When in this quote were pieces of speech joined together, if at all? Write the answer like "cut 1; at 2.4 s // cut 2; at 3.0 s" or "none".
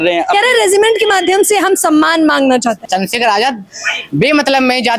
cut 1; at 2.8 s

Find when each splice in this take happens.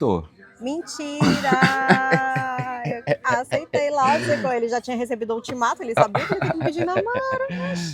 none

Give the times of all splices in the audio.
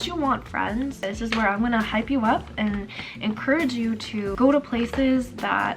cut 1; at 1.0 s // cut 2; at 4.3 s

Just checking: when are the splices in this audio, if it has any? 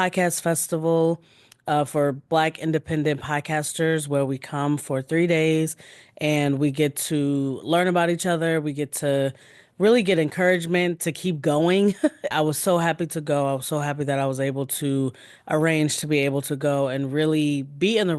cut 1; at 12.3 s

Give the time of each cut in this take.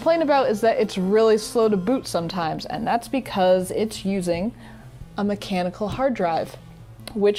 none

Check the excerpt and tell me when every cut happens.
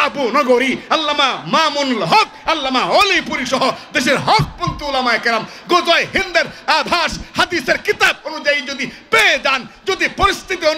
none

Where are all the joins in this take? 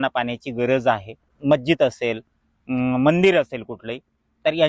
cut 1; at 1.3 s

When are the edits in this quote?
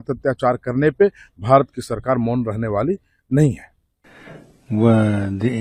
none

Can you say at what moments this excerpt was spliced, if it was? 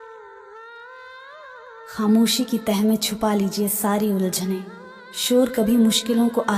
none

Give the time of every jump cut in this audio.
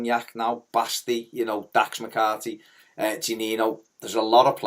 cut 1; at 1.8 s

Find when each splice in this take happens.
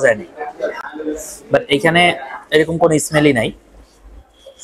none

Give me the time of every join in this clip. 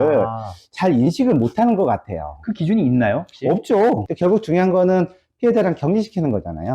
cut 1; at 4.1 s

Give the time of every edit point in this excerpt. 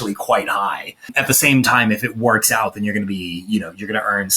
cut 1; at 1.2 s

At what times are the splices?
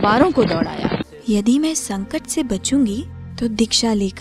cut 1; at 1.1 s

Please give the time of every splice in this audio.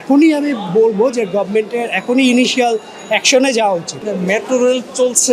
cut 1; at 4.0 s

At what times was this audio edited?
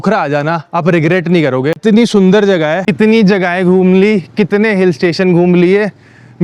cut 1; at 1.8 s // cut 2; at 2.9 s

